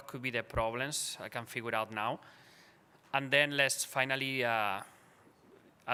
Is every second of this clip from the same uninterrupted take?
yes; 0 cuts

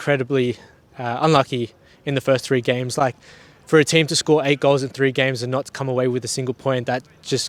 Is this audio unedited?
yes; 0 cuts

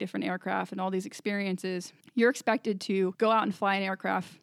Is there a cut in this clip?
yes; 2 cuts; at 2.0 s, 3.1 s

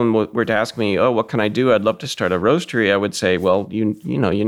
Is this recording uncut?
yes; 0 cuts

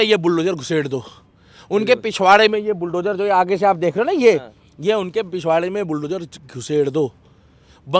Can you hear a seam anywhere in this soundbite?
no; 0 cuts

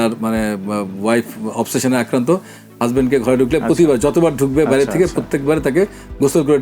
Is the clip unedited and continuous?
yes; 0 cuts

